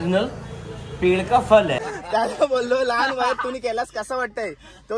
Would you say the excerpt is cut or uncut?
cut